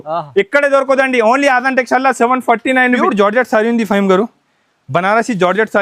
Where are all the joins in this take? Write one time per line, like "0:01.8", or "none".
0:03.0